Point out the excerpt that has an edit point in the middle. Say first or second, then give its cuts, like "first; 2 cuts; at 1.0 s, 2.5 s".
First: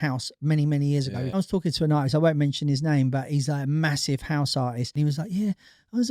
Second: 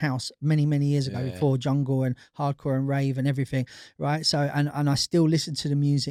first; 2 cuts; at 1.3 s, 4.9 s